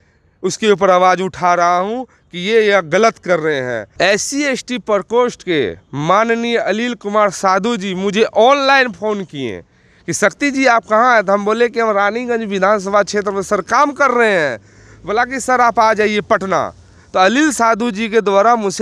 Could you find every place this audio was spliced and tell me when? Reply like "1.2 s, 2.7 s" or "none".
3.8 s